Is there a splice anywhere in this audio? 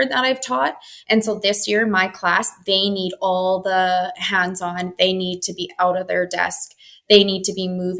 no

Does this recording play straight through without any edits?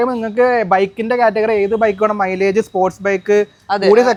yes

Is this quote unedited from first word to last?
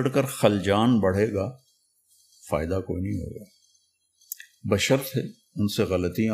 yes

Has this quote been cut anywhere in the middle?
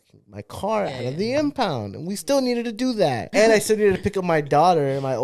yes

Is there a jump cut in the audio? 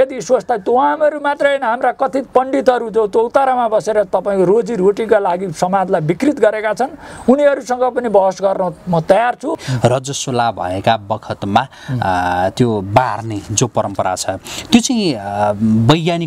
yes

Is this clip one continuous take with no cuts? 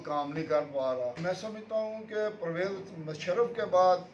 no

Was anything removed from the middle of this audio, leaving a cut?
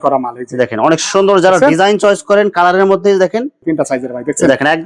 yes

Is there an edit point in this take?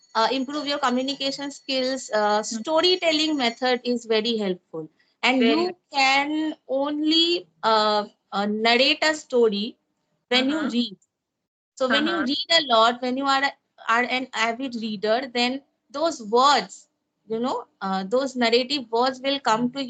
no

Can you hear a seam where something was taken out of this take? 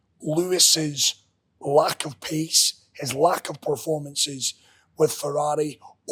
no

